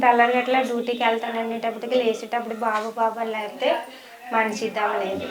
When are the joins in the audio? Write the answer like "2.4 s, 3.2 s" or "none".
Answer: none